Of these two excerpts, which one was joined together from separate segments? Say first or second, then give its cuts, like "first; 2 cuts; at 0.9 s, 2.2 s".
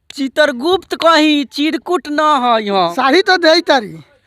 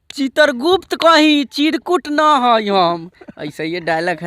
first; 1 cut; at 2.9 s